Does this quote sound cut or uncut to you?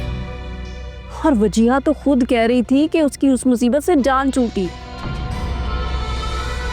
cut